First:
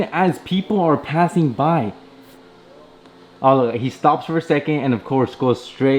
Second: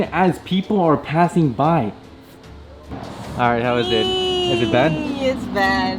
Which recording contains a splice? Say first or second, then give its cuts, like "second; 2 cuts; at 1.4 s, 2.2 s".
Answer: second; 1 cut; at 2.9 s